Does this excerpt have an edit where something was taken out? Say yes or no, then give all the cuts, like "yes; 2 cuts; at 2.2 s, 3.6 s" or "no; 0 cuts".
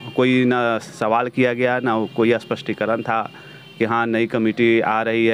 no; 0 cuts